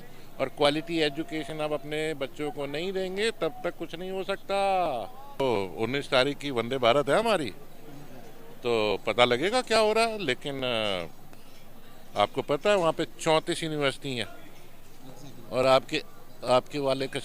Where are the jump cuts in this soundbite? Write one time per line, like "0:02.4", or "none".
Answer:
0:05.4